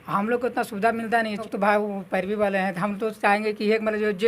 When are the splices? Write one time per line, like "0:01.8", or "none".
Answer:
0:01.5

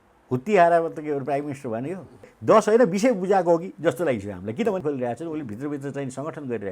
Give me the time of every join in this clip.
0:02.3
0:04.8

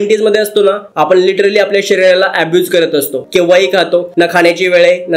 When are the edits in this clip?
0:03.2

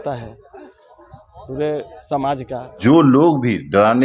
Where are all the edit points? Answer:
0:02.7

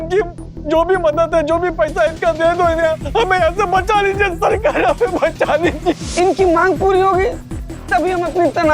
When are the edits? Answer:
0:05.9

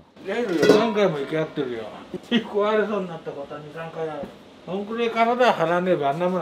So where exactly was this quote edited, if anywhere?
none

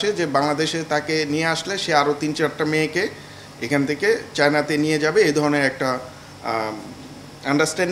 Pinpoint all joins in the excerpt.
none

